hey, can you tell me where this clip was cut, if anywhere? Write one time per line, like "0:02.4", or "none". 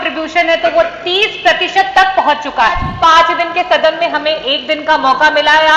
0:02.9